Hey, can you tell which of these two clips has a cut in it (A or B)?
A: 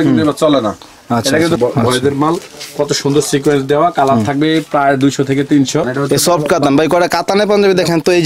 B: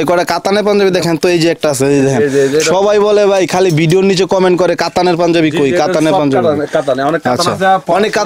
A